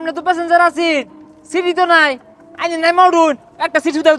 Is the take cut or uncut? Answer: uncut